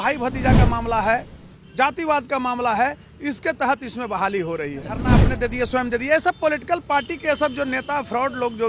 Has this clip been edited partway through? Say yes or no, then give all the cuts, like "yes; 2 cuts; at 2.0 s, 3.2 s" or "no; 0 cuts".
yes; 1 cut; at 5.0 s